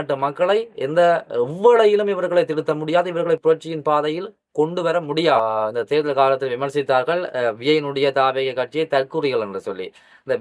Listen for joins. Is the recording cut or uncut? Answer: cut